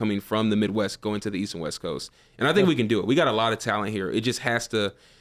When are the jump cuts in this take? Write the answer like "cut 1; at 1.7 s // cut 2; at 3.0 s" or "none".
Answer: none